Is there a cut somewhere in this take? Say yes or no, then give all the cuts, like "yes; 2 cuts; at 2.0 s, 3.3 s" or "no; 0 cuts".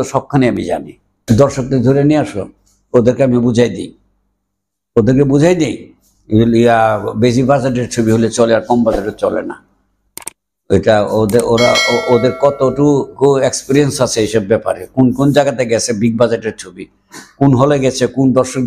yes; 1 cut; at 1.2 s